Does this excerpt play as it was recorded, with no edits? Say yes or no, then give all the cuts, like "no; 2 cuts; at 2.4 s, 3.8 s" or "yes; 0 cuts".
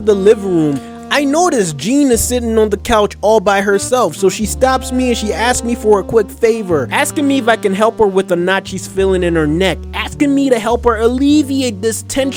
yes; 0 cuts